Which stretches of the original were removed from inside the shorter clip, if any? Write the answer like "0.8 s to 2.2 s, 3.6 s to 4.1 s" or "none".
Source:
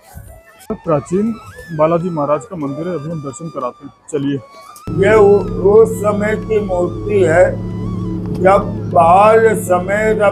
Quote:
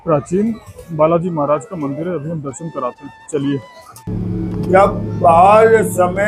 4.8 s to 7.7 s

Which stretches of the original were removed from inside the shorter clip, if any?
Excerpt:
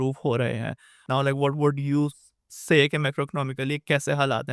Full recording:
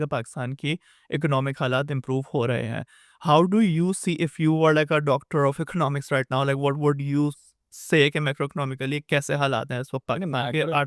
3.1 s to 6.3 s

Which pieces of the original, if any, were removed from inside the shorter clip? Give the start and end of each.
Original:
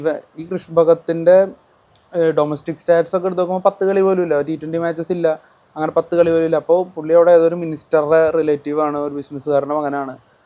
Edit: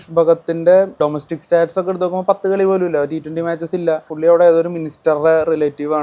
1.6 s to 2.3 s, 5.5 s to 7.0 s

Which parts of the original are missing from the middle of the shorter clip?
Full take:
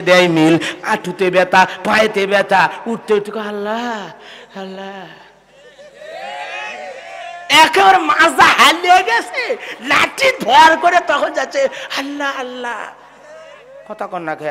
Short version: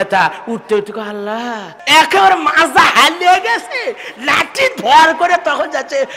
4.1 s to 7.4 s

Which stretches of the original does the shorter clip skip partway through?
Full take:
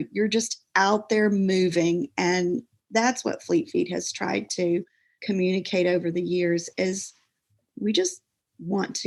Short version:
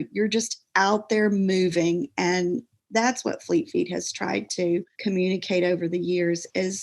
4.9 s to 5.1 s

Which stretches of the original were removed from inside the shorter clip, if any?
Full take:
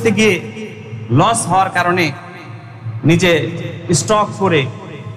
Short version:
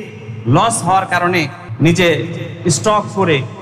2.2 s to 2.8 s

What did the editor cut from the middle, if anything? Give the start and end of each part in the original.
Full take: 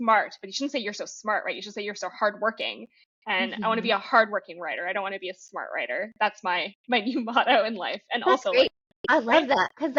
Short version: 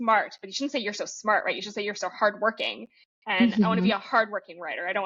none

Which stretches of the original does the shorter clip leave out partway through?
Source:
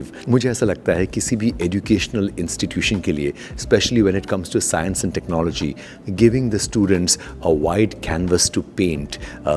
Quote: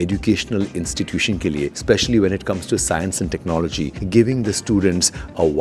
3.4 s to 3.6 s, 5.8 s to 6.0 s

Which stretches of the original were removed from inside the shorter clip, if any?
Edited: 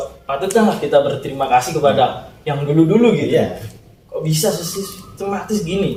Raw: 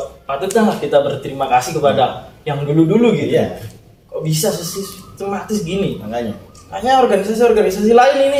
none

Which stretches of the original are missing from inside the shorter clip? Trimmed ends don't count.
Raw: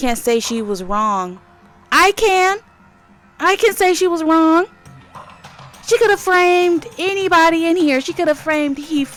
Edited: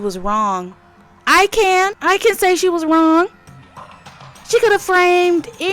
2.6 s to 3.3 s

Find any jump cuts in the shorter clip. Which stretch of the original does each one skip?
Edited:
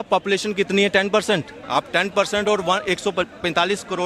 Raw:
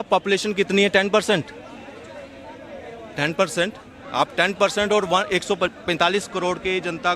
1.6 s to 4.0 s

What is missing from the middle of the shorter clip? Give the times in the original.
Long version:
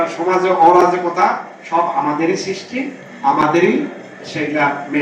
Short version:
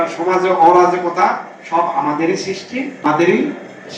3.1 s to 3.4 s

